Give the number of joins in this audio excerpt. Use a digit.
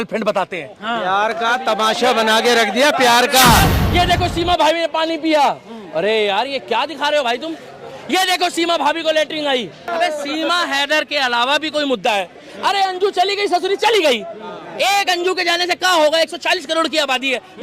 2